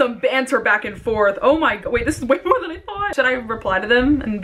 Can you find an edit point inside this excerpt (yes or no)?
yes